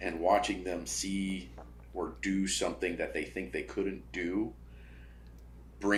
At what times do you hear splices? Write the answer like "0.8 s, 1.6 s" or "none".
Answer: none